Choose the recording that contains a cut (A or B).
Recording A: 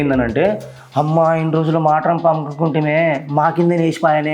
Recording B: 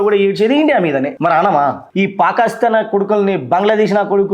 B